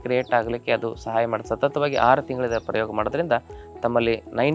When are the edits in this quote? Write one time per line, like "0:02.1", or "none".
0:01.4